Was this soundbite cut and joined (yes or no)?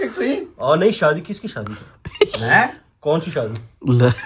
no